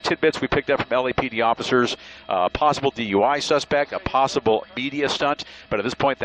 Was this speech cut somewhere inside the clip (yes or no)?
no